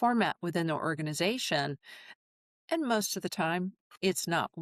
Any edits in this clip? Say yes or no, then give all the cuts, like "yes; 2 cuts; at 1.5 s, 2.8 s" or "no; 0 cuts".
no; 0 cuts